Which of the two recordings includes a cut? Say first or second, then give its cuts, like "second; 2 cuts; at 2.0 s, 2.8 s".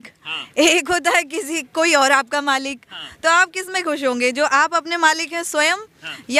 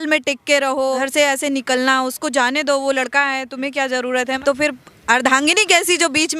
second; 2 cuts; at 1.0 s, 4.4 s